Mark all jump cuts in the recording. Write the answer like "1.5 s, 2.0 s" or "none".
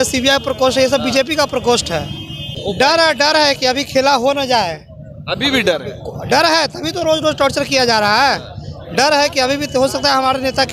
2.9 s